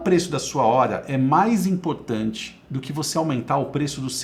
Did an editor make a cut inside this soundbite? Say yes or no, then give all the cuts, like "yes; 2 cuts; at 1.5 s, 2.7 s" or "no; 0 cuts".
no; 0 cuts